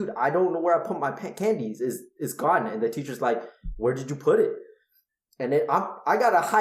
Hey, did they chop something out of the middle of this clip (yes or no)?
no